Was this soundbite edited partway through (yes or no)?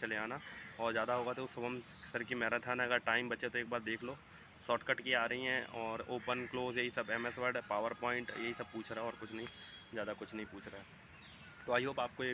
no